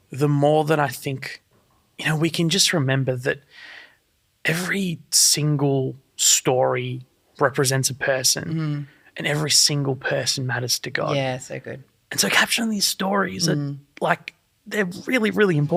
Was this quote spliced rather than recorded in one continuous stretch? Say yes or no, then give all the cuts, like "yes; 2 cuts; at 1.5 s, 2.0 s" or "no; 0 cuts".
no; 0 cuts